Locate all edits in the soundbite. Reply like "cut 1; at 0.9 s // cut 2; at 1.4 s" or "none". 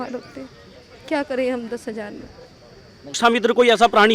cut 1; at 3.1 s